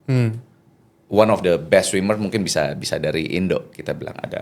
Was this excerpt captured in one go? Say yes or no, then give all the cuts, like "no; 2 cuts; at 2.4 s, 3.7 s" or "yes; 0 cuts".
no; 1 cut; at 1.0 s